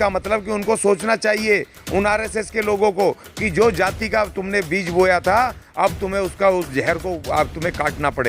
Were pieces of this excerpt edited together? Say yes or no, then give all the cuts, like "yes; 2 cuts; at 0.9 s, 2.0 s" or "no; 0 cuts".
no; 0 cuts